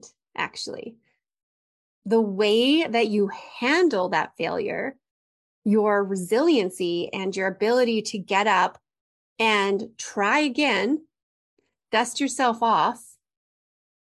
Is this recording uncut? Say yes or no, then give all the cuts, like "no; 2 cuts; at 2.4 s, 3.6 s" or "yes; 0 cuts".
yes; 0 cuts